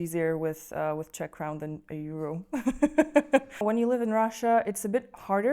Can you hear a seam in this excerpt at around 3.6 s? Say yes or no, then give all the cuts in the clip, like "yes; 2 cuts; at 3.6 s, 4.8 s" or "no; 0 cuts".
yes; 1 cut; at 3.6 s